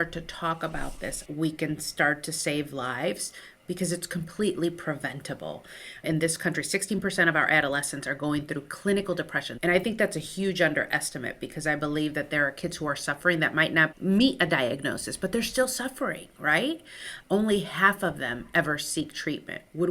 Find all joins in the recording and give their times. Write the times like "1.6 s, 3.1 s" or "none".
1.2 s, 5.9 s, 9.4 s

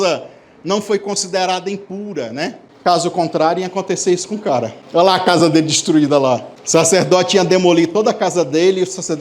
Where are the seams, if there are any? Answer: 2.6 s, 4.8 s, 6.5 s

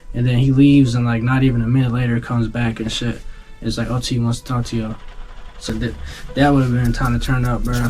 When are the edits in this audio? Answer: 5.7 s

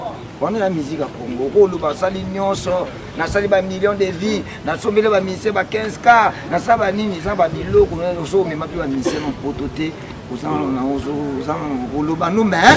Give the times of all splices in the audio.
none

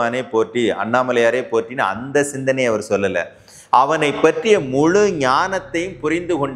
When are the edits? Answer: none

